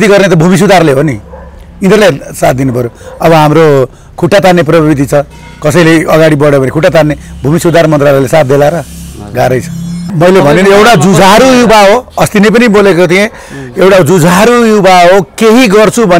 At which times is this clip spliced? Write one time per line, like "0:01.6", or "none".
0:10.0